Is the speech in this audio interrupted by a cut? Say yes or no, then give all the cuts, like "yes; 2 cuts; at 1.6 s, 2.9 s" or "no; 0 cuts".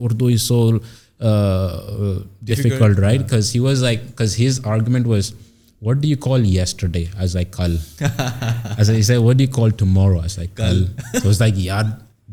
no; 0 cuts